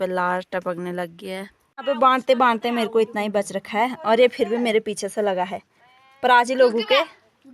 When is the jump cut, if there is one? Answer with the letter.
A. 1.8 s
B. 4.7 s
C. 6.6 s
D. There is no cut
A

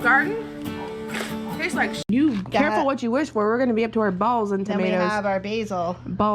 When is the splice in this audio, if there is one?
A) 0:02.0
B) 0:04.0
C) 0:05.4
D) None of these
A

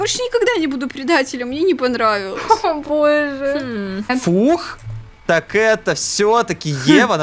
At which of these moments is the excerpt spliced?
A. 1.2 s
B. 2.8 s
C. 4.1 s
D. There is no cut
C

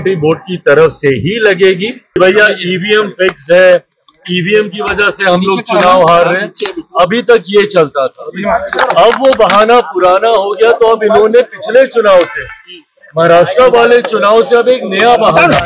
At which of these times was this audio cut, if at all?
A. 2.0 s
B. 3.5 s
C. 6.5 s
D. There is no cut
A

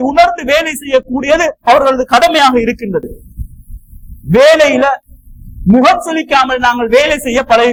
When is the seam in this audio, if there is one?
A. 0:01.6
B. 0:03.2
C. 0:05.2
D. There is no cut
D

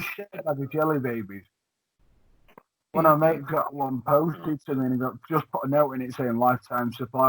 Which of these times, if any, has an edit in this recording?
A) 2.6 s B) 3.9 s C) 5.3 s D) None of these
D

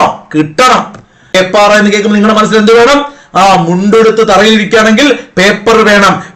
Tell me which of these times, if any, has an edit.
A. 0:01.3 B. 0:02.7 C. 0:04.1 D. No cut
A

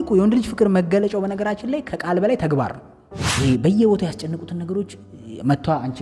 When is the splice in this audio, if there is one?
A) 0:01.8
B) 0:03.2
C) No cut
B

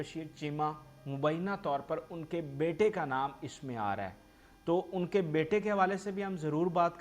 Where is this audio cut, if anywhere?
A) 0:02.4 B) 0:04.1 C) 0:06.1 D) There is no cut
D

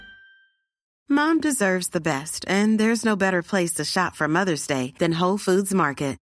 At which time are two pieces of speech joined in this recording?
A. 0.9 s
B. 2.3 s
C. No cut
C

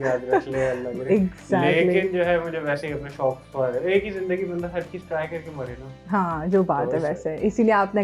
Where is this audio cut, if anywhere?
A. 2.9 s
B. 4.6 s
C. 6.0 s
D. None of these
D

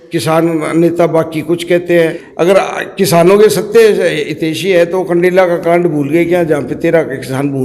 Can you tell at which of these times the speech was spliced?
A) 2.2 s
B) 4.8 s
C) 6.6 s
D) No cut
A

